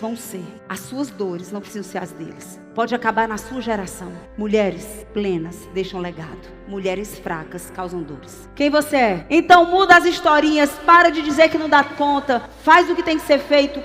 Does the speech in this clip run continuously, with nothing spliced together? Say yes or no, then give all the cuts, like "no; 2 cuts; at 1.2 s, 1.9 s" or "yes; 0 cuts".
no; 1 cut; at 9.2 s